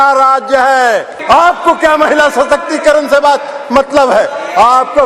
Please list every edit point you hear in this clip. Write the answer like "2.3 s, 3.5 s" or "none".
1.1 s